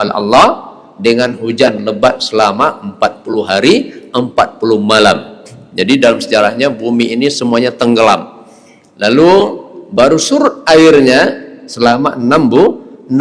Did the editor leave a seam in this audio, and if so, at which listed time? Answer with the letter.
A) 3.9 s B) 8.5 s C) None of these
C